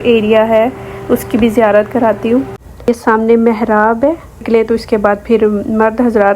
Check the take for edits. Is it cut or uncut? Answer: cut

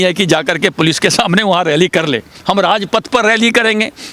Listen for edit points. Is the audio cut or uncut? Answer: cut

